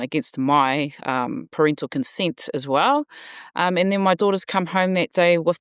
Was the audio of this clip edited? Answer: no; 0 cuts

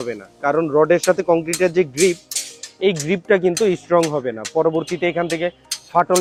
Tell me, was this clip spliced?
no; 0 cuts

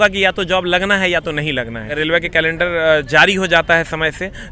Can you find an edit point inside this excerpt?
yes; 1 cut; at 1.9 s

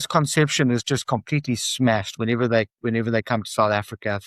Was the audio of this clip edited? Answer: no; 0 cuts

